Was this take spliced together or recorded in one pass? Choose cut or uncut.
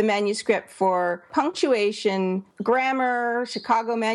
cut